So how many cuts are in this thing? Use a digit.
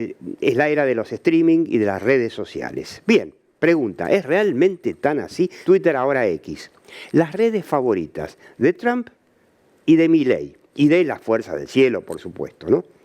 1